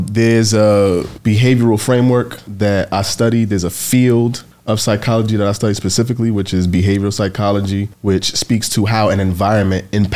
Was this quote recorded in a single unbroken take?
no; 4 cuts; at 1.1 s, 2.4 s, 4.5 s, 7.9 s

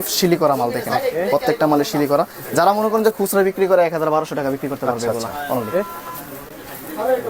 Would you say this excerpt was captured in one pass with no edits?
yes; 0 cuts

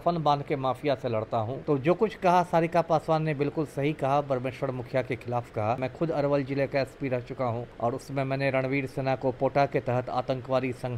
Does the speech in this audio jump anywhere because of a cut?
yes; 3 cuts; at 1.5 s, 5.9 s, 7.7 s

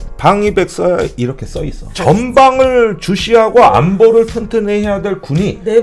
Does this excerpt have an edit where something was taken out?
yes; 1 cut; at 1.9 s

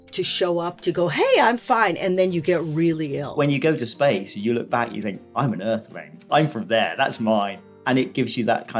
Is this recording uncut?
no; 2 cuts; at 3.3 s, 7.8 s

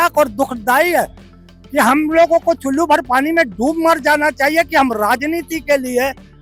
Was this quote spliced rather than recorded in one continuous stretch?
no; 0 cuts

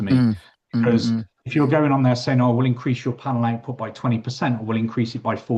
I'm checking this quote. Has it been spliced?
no; 0 cuts

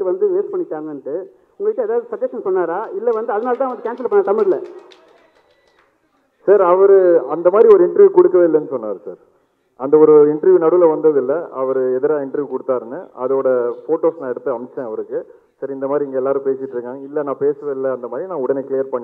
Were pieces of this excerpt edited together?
no; 0 cuts

